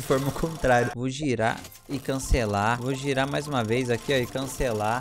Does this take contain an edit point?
yes; 2 cuts; at 0.9 s, 2.8 s

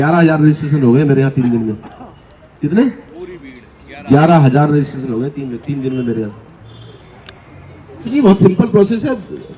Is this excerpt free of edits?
no; 1 cut; at 8.1 s

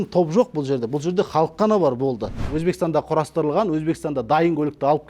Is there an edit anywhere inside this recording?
yes; 1 cut; at 2.5 s

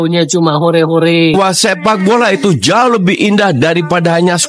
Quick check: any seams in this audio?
yes; 1 cut; at 1.3 s

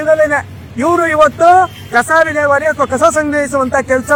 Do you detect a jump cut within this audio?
no; 0 cuts

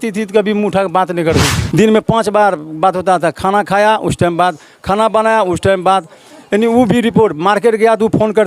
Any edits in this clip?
yes; 1 cut; at 1.6 s

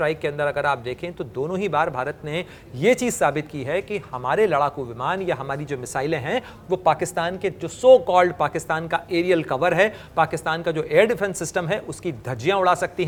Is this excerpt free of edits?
yes; 0 cuts

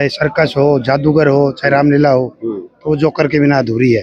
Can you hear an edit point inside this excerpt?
no; 0 cuts

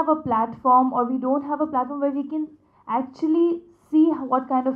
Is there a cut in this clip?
no; 0 cuts

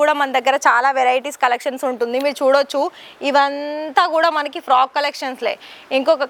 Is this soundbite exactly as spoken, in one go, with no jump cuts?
yes; 0 cuts

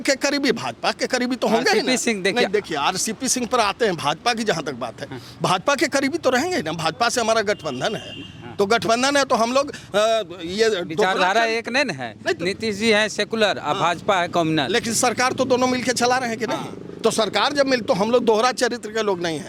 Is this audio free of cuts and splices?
yes; 0 cuts

